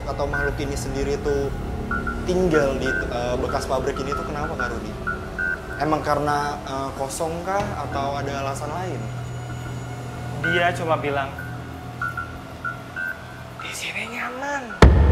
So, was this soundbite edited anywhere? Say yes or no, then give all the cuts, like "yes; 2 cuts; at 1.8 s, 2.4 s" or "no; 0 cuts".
no; 0 cuts